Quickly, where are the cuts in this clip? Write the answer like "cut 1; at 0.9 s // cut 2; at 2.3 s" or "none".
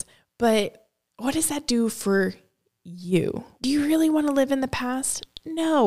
cut 1; at 3.6 s